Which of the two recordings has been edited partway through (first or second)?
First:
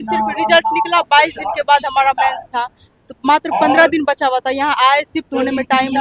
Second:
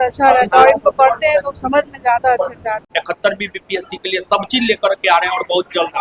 second